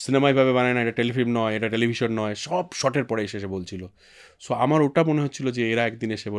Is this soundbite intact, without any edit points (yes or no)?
yes